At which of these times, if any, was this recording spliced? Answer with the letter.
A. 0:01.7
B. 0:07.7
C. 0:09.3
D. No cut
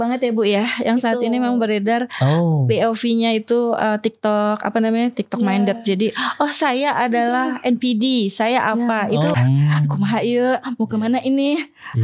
C